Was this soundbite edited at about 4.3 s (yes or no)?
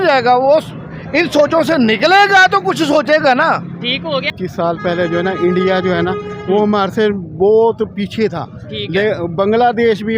yes